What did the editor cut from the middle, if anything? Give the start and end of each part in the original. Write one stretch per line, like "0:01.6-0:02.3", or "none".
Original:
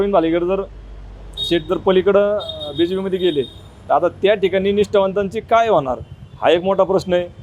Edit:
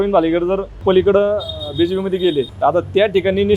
0:00.8-0:01.8
0:03.5-0:03.8